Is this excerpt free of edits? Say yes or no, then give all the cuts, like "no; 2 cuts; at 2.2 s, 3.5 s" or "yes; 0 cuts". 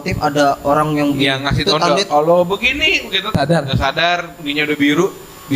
no; 1 cut; at 3.4 s